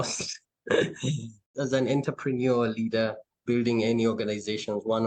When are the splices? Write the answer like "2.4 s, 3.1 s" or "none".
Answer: 3.3 s